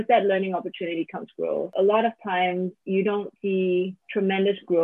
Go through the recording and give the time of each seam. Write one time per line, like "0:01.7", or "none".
0:01.7
0:02.8
0:03.5